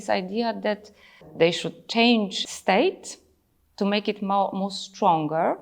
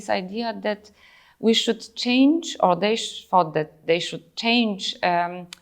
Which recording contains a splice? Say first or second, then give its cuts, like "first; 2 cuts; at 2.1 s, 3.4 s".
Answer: first; 2 cuts; at 1.3 s, 2.4 s